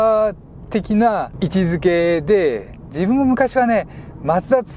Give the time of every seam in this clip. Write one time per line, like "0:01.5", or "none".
0:01.3